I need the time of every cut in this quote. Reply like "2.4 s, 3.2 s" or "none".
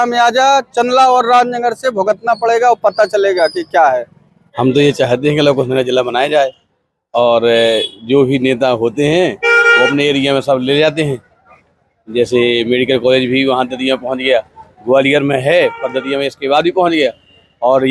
none